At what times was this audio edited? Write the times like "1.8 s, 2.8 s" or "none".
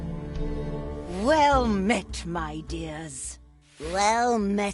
1.1 s